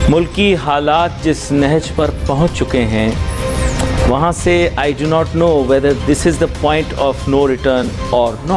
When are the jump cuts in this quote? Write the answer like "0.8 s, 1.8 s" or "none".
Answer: none